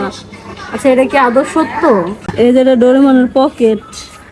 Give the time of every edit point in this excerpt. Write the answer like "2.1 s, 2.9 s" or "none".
2.3 s